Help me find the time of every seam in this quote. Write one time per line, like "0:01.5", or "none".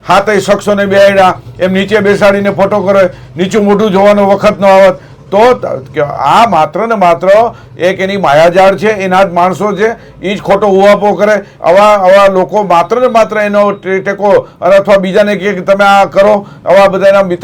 none